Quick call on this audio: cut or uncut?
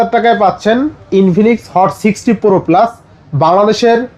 uncut